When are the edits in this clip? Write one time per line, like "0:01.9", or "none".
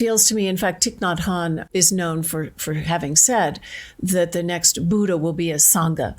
0:01.6